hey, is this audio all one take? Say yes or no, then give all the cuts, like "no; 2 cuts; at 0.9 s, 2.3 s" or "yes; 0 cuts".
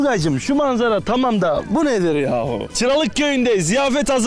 no; 1 cut; at 2.7 s